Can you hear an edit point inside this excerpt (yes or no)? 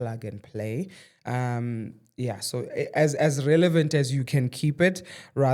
no